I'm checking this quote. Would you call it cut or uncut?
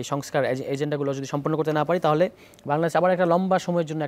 uncut